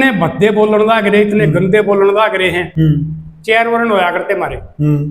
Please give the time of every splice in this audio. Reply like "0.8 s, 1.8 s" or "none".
none